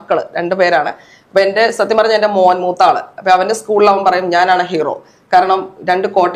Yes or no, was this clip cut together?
no